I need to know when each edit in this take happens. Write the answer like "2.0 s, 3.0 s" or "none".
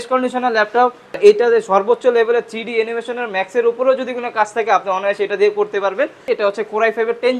1.2 s, 6.3 s